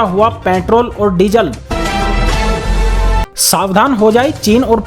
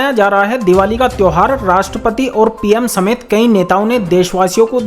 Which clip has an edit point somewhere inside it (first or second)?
first